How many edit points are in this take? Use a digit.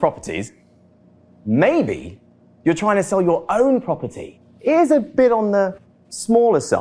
0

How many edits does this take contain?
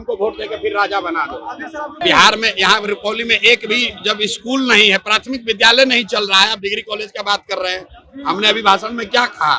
1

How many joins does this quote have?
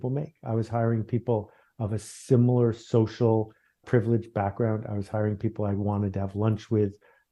0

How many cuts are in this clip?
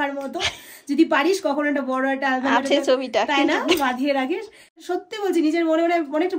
1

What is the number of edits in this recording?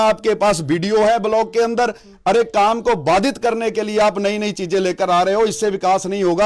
0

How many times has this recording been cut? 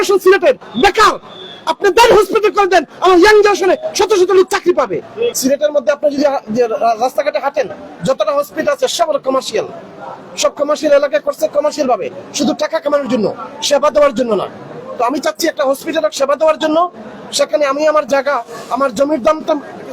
1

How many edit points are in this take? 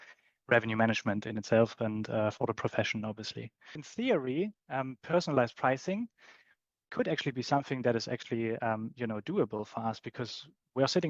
1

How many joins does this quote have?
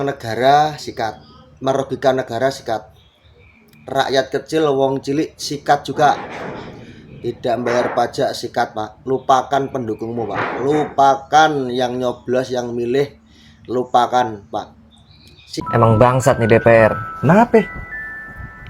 1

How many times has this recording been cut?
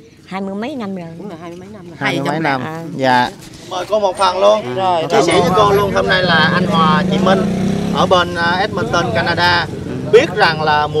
1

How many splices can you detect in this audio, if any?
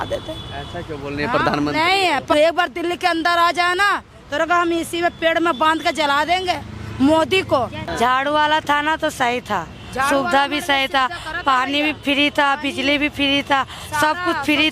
2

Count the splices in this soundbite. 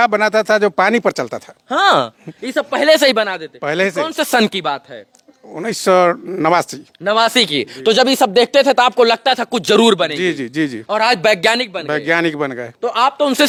0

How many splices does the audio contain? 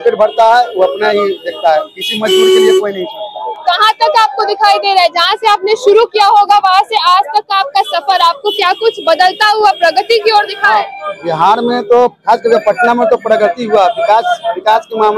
0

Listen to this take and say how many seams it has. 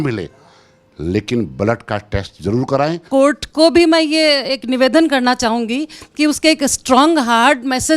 1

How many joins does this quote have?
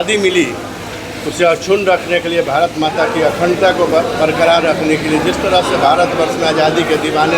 0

